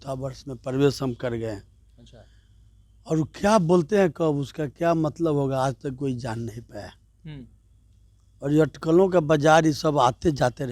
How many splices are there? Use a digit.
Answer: 0